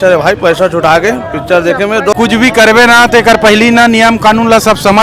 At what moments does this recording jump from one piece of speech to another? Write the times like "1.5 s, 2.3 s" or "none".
2.2 s

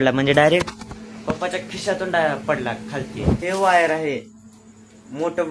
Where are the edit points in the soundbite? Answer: 3.4 s

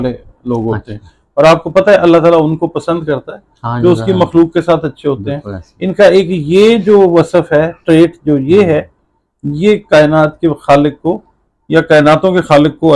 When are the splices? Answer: none

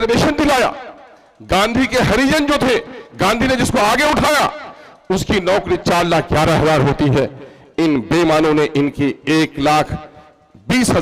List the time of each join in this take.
none

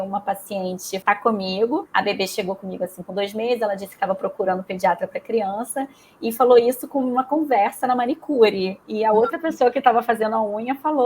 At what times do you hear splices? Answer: 0.9 s, 1.9 s

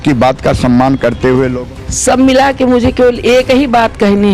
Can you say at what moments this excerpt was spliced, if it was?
1.6 s

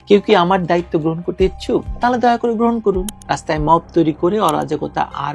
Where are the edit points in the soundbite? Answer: 3.1 s

